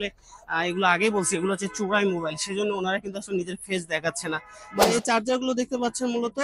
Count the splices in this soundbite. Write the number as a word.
one